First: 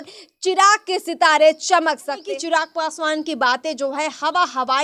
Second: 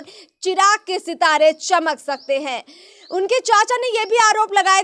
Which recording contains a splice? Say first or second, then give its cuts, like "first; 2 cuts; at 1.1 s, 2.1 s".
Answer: first; 1 cut; at 2.2 s